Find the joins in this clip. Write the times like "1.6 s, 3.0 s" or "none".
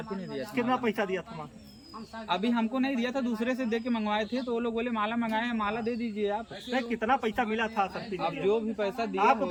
none